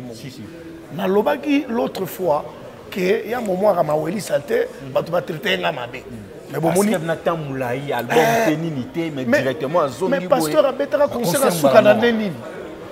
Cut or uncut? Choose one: uncut